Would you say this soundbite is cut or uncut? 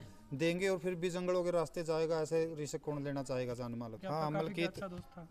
cut